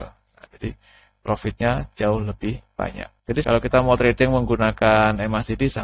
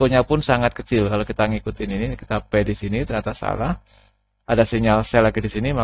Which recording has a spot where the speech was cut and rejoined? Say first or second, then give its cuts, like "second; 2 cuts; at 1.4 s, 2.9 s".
first; 1 cut; at 3.3 s